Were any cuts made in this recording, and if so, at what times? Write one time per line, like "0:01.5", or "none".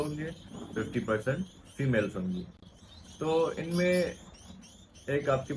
none